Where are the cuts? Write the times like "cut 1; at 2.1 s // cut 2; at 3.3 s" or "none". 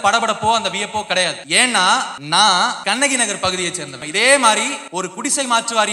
cut 1; at 1.4 s // cut 2; at 2.2 s // cut 3; at 2.8 s // cut 4; at 4.0 s // cut 5; at 4.8 s